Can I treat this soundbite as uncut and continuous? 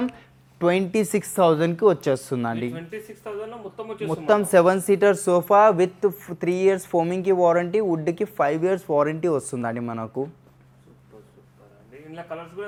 yes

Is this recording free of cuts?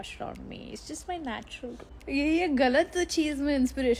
no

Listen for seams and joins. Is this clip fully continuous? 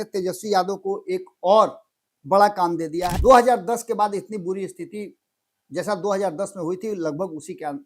no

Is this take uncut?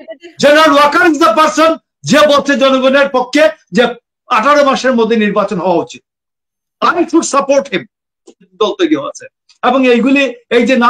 no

